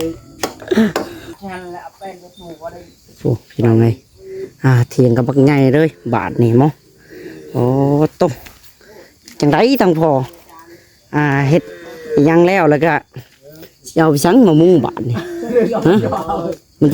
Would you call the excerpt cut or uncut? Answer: cut